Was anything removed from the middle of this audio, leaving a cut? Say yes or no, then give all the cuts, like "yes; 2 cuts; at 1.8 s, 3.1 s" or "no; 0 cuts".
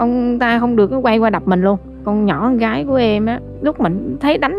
yes; 2 cuts; at 2.0 s, 3.5 s